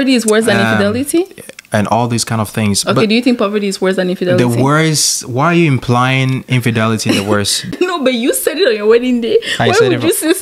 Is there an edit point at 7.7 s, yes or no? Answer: yes